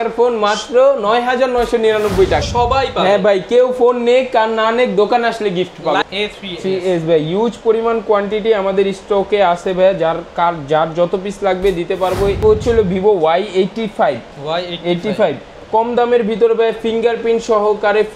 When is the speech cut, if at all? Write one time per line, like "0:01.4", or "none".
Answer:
0:02.5
0:06.0
0:12.4

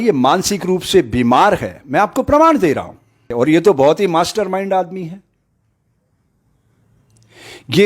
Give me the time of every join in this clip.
0:03.3

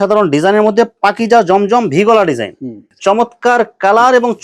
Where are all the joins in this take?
0:02.8

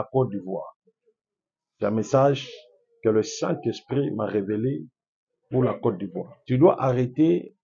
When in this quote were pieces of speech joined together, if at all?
0:06.3

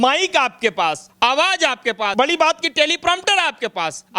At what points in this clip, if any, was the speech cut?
0:01.0
0:02.1

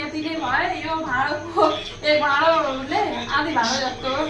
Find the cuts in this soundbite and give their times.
none

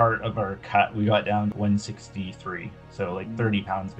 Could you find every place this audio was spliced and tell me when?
0:01.5

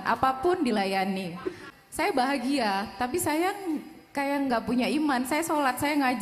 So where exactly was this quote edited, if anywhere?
0:01.6

